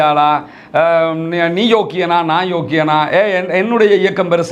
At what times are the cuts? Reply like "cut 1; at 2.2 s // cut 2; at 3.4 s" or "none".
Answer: none

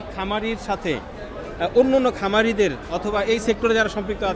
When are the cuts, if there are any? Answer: none

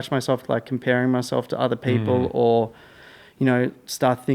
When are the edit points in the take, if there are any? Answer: none

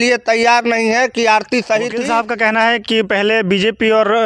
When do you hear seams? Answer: cut 1; at 2.1 s

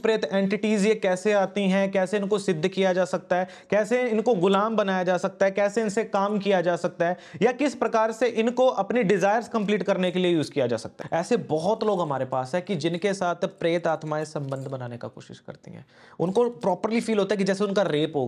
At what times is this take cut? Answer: cut 1; at 10.9 s

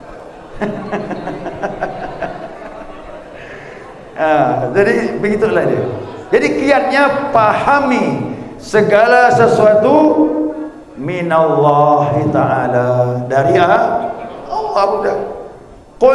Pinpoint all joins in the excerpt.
none

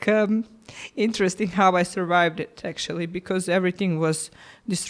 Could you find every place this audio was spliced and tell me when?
none

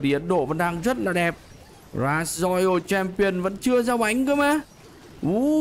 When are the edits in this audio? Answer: none

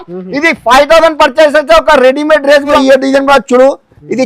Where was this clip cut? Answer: cut 1; at 2.8 s

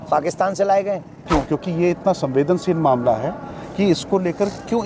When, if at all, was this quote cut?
cut 1; at 1.2 s

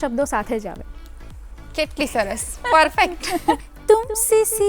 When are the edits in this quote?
cut 1; at 3.7 s

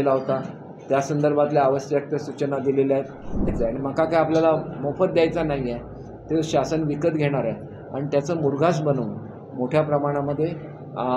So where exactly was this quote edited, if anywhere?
cut 1; at 3.5 s

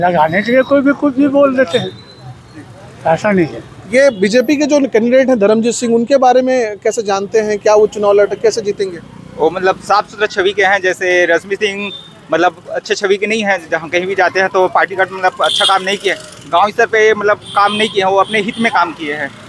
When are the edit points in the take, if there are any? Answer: none

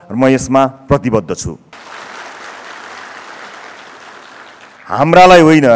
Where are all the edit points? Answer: cut 1; at 1.7 s // cut 2; at 4.8 s

